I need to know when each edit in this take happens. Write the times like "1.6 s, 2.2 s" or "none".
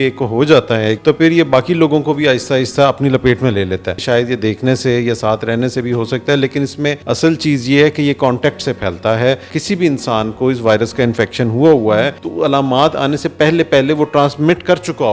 1.0 s, 4.0 s, 7.0 s, 9.5 s, 12.2 s

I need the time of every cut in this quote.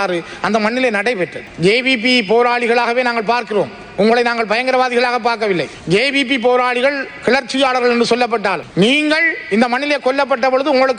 1.5 s

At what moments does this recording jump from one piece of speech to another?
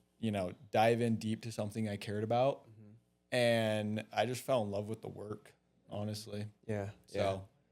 none

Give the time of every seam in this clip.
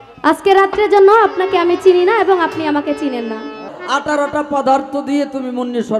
3.7 s

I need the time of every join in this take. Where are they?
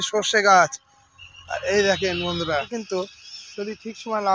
2.7 s

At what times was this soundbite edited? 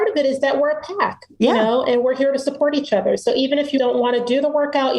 3.8 s

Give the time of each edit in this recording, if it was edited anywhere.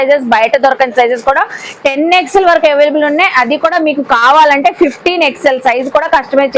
none

